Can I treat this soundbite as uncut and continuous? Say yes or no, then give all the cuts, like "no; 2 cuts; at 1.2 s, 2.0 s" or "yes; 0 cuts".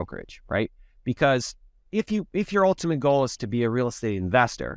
yes; 0 cuts